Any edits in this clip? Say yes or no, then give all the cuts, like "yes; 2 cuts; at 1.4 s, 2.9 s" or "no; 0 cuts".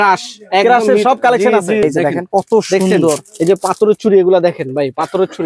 yes; 1 cut; at 1.8 s